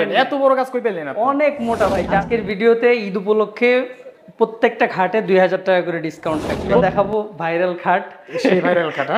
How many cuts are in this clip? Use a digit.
2